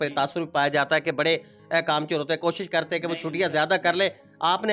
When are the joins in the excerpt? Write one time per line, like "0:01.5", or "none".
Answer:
none